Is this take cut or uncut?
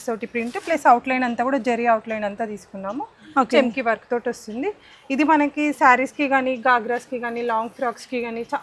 uncut